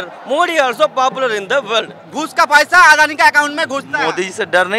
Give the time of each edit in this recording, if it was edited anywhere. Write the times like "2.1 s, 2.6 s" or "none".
2.0 s